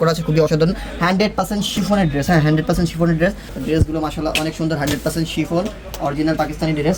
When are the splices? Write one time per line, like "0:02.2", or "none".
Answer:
0:03.5